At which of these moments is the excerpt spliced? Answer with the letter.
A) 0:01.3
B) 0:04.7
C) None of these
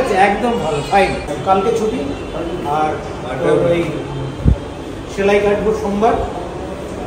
A